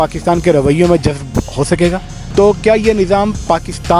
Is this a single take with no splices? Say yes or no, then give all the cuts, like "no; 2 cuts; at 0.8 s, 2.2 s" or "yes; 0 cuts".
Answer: no; 1 cut; at 2.1 s